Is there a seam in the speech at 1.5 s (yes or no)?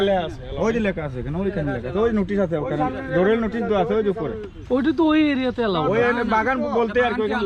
no